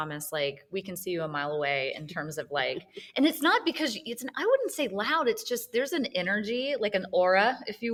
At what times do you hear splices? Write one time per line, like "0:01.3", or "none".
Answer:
none